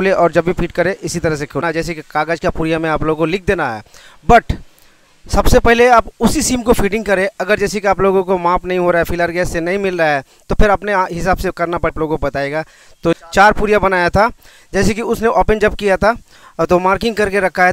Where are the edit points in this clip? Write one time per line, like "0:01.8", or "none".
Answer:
none